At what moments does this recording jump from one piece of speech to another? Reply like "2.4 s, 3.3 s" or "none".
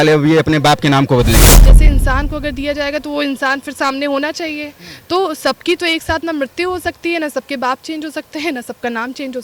1.8 s

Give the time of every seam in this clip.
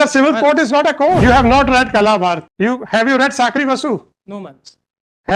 1.2 s, 2.5 s

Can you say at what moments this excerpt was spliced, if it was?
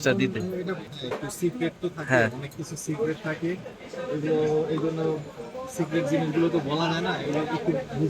0.9 s

